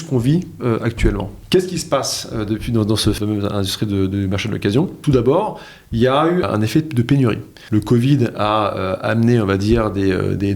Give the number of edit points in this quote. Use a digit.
5